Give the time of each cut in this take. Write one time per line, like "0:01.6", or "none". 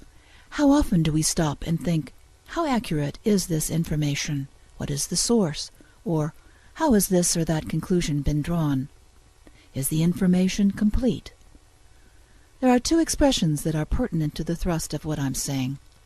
0:13.6